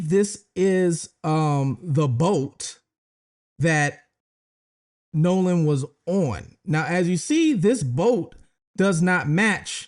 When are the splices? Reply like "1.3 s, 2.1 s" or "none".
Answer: none